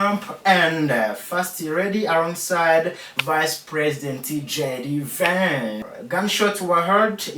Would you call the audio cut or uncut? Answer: cut